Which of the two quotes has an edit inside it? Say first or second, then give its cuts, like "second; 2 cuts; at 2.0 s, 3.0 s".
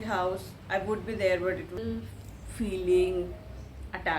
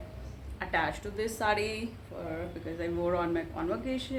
first; 1 cut; at 1.7 s